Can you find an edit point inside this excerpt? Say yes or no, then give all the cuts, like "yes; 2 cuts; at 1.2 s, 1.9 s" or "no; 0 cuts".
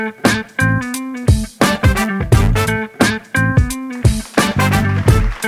no; 0 cuts